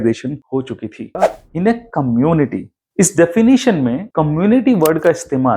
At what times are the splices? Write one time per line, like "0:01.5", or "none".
0:01.2